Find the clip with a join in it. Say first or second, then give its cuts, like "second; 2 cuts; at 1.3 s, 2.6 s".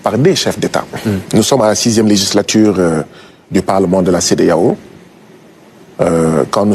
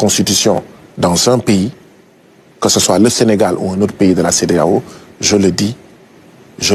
first; 1 cut; at 1.2 s